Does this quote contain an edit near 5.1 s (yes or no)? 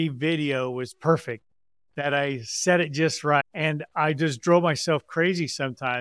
no